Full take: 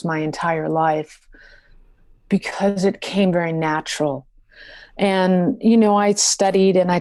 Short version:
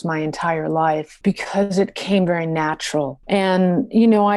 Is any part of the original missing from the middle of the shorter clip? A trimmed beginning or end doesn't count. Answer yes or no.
yes